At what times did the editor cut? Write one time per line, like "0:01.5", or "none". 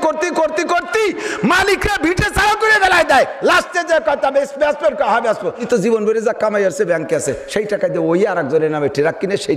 0:05.6